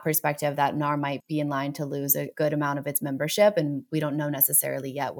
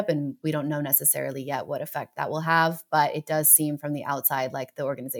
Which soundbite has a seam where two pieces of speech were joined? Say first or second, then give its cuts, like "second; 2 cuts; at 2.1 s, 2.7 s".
first; 2 cuts; at 1.2 s, 2.3 s